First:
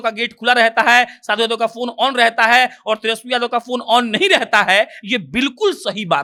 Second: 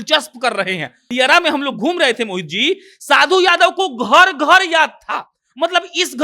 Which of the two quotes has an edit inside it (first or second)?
second